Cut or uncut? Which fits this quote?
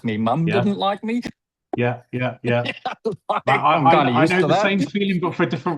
uncut